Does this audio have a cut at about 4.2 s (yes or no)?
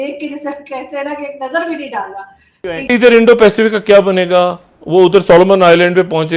no